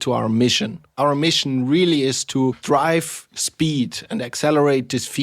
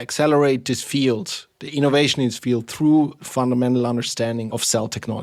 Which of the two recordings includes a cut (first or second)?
first